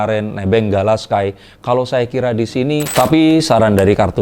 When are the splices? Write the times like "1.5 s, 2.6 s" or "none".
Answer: 2.9 s